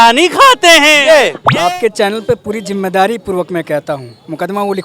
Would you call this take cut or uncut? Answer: cut